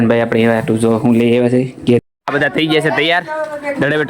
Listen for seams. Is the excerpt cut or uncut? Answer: cut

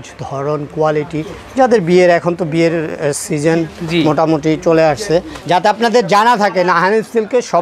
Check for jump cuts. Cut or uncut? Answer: cut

